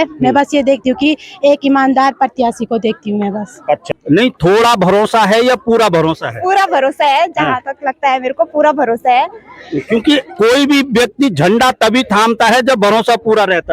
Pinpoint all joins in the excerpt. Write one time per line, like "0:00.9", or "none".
0:03.8